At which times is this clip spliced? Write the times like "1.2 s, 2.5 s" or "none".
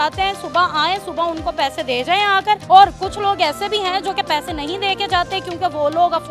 2.6 s